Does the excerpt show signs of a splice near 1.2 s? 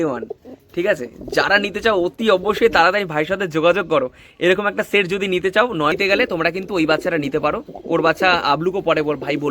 no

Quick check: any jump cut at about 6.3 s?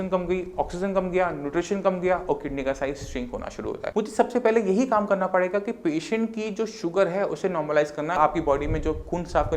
no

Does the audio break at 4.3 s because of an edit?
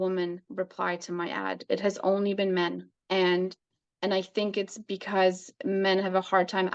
no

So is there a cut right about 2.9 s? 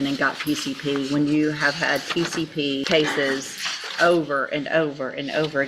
yes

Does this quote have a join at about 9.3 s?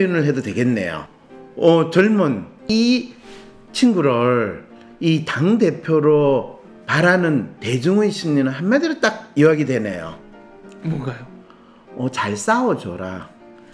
no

